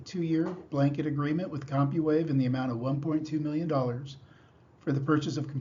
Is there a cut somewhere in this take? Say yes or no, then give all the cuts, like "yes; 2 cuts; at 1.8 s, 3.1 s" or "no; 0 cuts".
no; 0 cuts